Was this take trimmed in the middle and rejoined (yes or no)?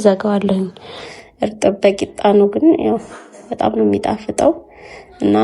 yes